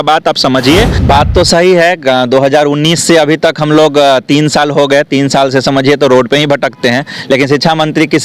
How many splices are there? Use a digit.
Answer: 1